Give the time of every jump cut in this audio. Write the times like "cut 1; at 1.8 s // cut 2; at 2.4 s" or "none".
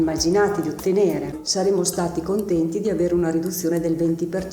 cut 1; at 1.4 s